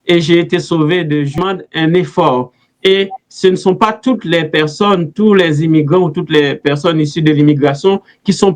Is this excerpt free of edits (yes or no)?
no